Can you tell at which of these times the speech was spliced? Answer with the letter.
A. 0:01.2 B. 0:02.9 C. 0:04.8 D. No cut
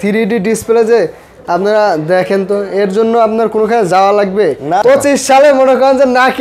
C